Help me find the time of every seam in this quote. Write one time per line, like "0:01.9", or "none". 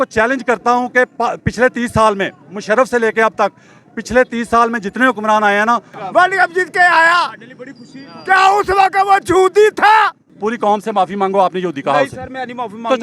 0:06.0
0:10.3